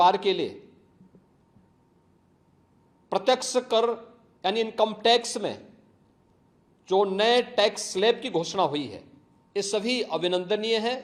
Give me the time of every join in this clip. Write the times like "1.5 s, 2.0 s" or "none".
none

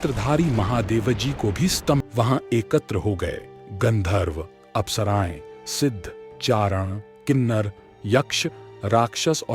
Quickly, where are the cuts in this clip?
2.0 s

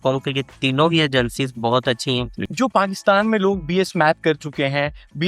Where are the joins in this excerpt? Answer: 2.5 s

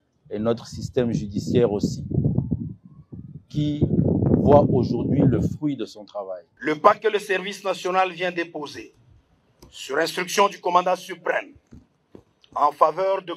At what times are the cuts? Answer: 6.6 s

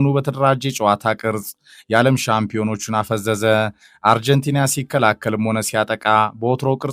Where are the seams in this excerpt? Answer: none

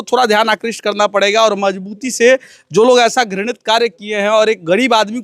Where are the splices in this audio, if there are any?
none

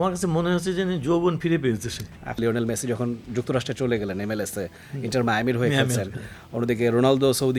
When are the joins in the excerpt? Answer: 2.4 s

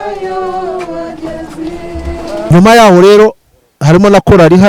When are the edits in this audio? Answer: 2.3 s

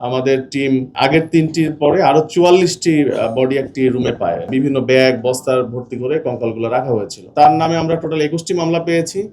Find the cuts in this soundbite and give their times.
0.9 s, 4.5 s, 7.2 s

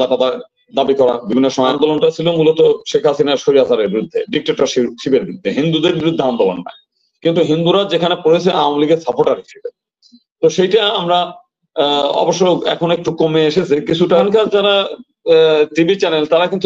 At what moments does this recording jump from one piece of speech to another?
1.7 s, 14.1 s

